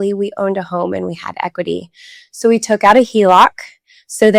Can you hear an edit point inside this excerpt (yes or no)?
no